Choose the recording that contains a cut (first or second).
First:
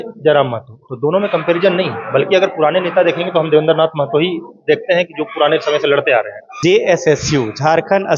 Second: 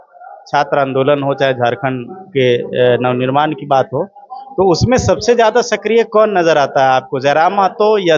first